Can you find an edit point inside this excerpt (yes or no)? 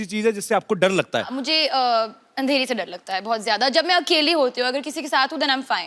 yes